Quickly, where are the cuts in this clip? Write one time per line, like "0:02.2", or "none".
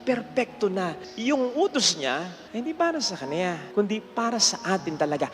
0:01.0
0:02.4
0:03.6